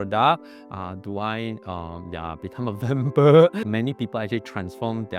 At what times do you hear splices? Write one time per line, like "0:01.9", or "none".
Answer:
0:03.6

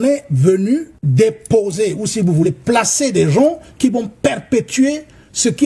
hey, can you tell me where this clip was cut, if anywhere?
0:01.0

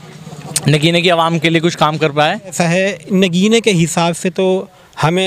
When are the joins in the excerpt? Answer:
0:02.6

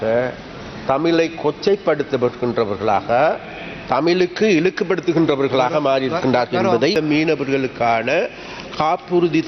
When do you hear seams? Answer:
0:06.9

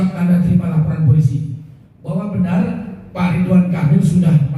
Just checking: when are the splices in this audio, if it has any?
none

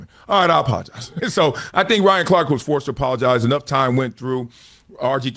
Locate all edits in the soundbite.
none

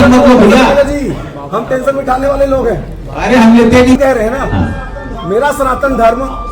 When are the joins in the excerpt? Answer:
0:04.0

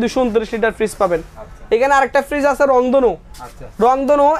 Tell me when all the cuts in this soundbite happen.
none

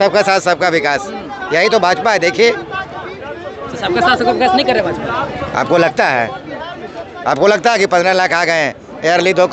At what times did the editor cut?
none

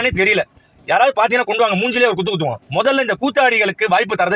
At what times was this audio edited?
0:02.6

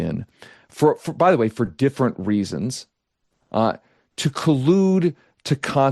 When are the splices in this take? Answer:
none

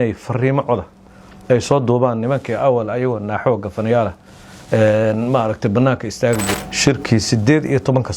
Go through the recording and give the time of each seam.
0:06.5

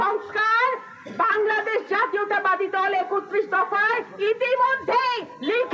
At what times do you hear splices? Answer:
none

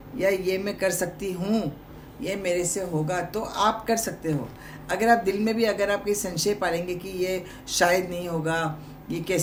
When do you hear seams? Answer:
none

